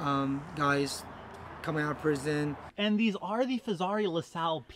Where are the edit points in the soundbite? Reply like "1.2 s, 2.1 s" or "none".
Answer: 2.7 s

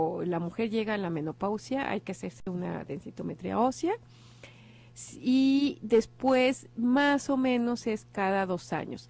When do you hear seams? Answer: none

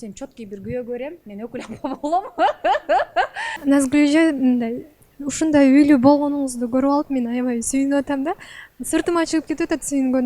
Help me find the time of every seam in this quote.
3.6 s

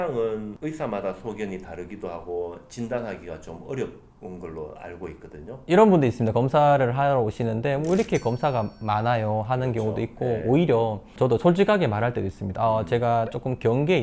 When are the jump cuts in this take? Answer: 5.6 s

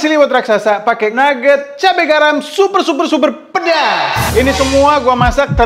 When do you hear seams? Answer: 1.1 s

